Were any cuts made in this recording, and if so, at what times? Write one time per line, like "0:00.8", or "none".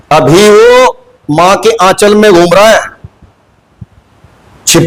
none